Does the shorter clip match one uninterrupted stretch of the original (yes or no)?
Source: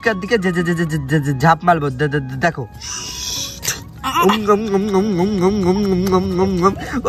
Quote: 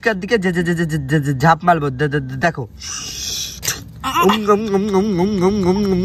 yes